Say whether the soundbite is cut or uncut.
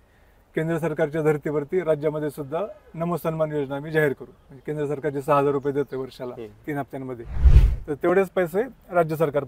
uncut